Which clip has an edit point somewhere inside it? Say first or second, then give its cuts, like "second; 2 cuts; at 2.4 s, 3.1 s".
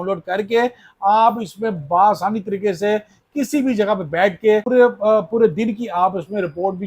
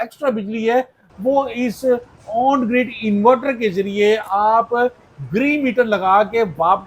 first; 1 cut; at 4.6 s